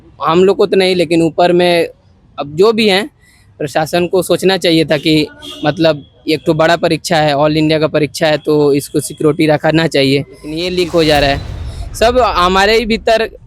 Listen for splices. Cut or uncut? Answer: cut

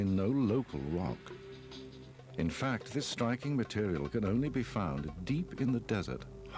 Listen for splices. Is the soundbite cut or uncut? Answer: cut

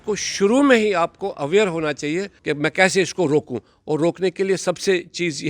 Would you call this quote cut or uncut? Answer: cut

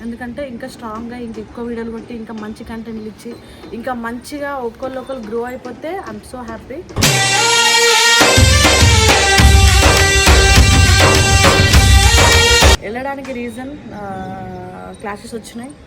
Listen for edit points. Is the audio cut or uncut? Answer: cut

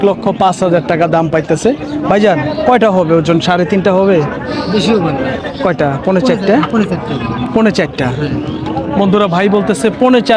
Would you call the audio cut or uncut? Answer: uncut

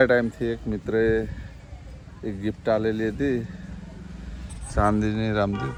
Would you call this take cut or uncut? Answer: uncut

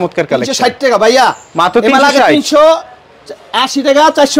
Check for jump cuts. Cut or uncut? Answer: uncut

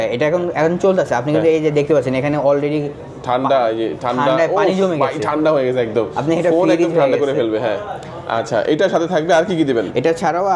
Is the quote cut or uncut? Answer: uncut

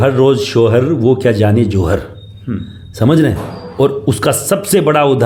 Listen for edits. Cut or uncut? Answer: uncut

